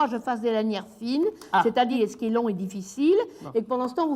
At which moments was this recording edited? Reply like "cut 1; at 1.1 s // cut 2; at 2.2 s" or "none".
cut 1; at 2.0 s